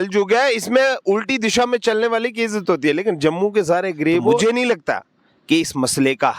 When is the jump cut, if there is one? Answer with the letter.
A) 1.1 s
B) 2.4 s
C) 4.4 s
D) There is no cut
C